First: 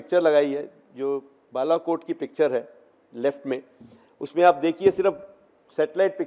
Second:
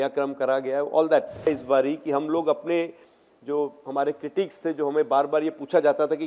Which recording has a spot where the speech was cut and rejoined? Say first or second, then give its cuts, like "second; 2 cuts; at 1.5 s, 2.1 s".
second; 1 cut; at 1.5 s